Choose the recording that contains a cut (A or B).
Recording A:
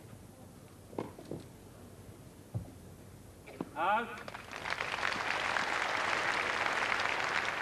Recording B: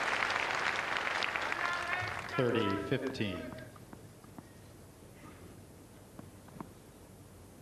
A